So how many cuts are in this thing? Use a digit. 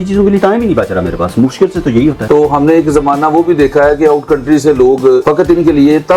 1